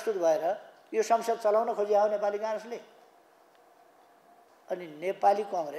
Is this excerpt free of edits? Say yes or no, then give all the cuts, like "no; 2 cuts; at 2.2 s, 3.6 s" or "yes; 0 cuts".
no; 1 cut; at 4.5 s